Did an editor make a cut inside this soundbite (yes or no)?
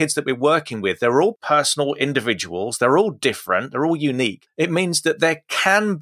yes